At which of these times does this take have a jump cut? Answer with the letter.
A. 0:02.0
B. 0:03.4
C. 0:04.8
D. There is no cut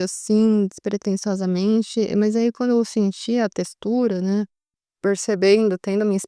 C